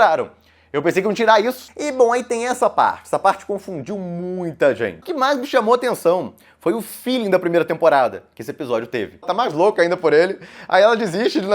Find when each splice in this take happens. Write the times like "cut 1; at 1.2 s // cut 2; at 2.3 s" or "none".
cut 1; at 1.6 s // cut 2; at 5.0 s // cut 3; at 9.3 s